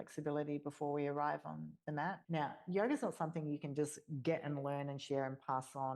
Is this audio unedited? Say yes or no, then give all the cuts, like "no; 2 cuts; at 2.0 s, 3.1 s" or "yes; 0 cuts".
no; 1 cut; at 2.2 s